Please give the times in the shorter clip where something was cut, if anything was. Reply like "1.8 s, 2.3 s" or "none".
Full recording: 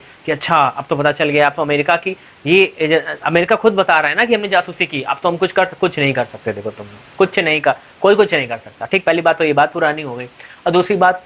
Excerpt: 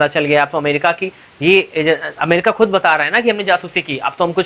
none